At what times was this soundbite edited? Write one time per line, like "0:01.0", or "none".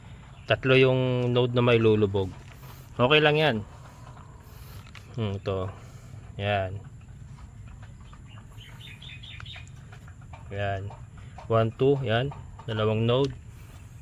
none

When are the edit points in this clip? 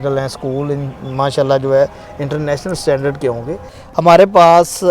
0:03.8

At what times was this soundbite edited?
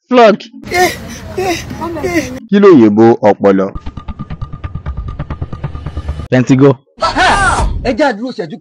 0:02.4

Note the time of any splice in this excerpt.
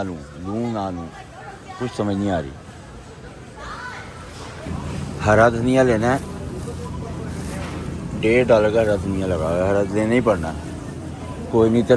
none

